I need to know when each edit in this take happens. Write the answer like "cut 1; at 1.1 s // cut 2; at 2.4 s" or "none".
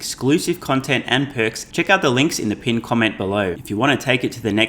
cut 1; at 1.6 s // cut 2; at 3.6 s